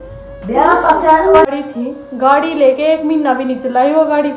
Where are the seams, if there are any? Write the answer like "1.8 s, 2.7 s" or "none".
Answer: 1.5 s